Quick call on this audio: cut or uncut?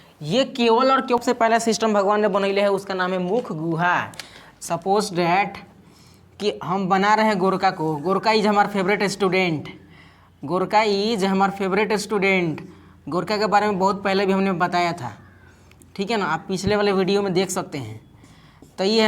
cut